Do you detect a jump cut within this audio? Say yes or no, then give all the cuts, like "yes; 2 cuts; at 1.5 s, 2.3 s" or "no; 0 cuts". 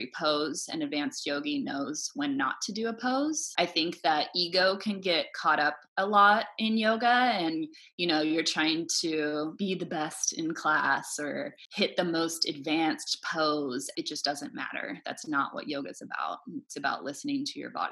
yes; 4 cuts; at 3.4 s, 9.5 s, 11.6 s, 13.9 s